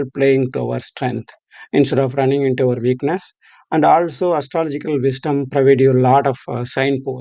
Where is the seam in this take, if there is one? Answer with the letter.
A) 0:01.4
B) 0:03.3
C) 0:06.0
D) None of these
D